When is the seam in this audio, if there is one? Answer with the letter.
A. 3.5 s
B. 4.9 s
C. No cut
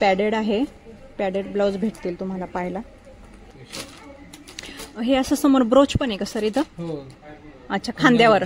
A